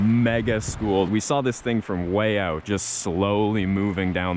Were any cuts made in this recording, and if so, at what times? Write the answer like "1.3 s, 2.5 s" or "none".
1.1 s, 2.6 s